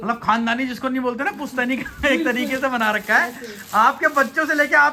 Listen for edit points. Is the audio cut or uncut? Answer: uncut